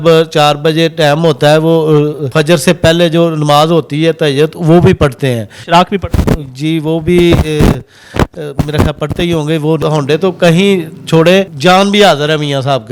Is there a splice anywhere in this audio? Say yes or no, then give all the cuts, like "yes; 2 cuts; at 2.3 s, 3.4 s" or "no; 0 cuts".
yes; 4 cuts; at 2.2 s, 5.5 s, 9.8 s, 11.5 s